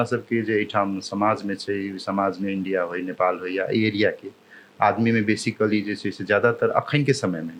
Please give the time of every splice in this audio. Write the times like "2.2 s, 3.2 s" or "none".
none